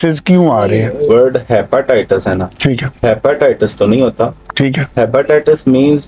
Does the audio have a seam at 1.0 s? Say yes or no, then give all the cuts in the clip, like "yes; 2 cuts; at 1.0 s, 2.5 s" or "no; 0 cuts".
yes; 1 cut; at 1.0 s